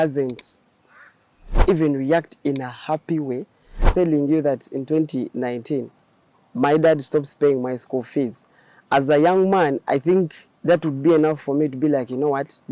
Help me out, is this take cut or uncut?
cut